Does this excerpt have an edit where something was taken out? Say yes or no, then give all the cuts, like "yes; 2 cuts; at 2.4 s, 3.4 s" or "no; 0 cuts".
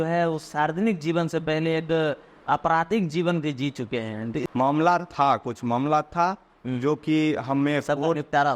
yes; 1 cut; at 4.4 s